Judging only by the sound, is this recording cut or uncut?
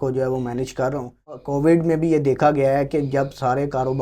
cut